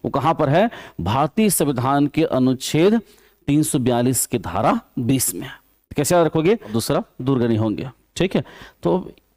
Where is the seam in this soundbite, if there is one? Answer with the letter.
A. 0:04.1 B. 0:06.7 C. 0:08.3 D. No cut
B